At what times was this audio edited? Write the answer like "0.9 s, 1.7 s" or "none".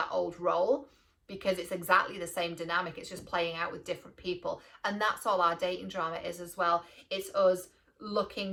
none